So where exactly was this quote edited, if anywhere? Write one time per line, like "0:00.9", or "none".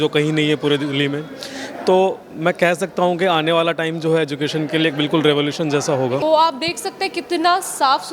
0:06.2